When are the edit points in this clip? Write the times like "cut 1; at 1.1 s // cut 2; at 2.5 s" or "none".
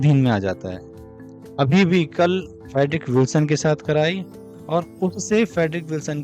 cut 1; at 2.6 s